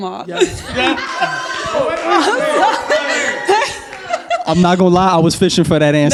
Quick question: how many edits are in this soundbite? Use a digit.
0